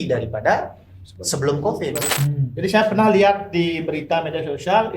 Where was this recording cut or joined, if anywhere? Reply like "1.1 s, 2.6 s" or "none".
2.1 s